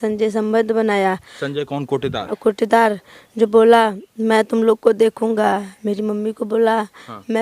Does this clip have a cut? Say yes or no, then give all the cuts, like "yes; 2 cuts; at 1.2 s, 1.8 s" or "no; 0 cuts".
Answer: no; 0 cuts